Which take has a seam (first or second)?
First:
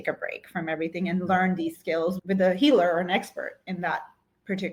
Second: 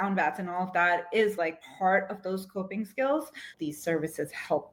second